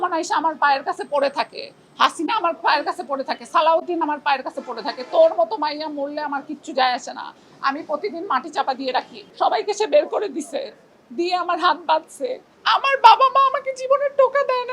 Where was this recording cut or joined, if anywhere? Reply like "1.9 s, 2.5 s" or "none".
9.2 s, 12.5 s